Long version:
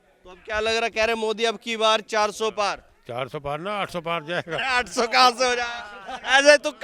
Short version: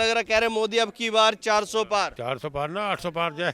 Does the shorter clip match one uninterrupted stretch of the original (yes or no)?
no